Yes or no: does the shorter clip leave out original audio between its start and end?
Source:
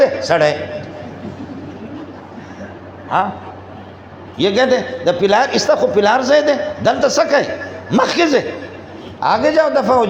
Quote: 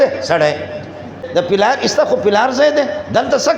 yes